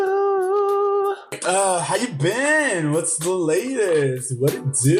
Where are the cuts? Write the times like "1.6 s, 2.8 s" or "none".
1.4 s